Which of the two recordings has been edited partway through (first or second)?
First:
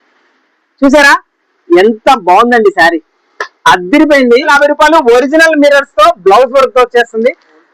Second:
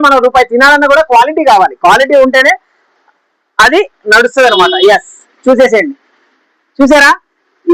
first